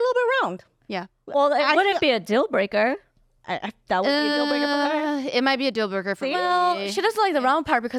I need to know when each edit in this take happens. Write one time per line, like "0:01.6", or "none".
none